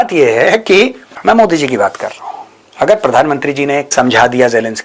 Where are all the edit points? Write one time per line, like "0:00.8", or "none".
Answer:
0:01.1
0:03.9

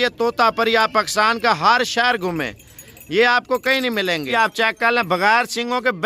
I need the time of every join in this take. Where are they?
0:04.3

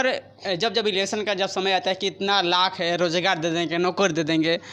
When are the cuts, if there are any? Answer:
none

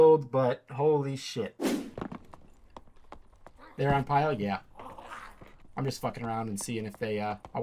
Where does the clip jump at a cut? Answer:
none

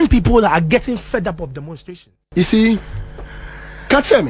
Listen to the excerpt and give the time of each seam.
0:01.8

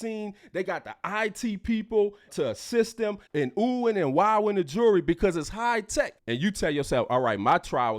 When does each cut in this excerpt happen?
0:03.3
0:06.2

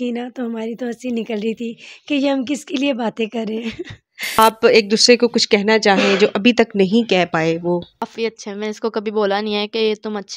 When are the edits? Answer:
0:04.4
0:08.1

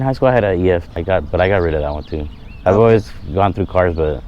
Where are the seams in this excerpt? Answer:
0:00.9

